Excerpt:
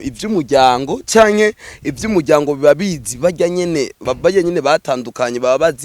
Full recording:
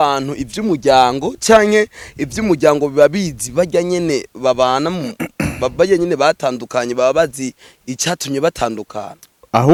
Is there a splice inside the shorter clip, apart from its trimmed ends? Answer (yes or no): yes